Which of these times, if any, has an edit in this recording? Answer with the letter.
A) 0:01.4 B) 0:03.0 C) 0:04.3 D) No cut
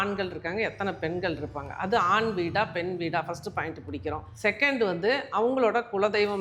C